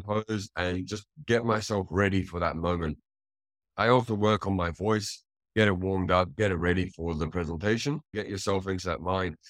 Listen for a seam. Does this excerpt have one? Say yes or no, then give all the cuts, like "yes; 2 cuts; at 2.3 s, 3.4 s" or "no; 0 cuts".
yes; 1 cut; at 8.1 s